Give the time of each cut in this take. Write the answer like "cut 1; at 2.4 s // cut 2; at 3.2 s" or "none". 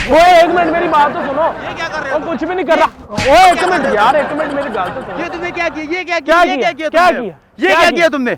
none